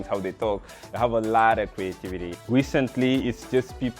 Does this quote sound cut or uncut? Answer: cut